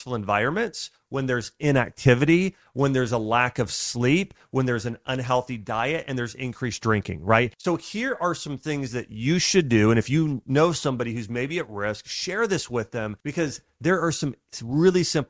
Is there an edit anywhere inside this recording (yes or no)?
yes